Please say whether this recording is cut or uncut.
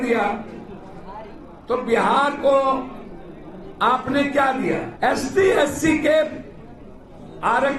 cut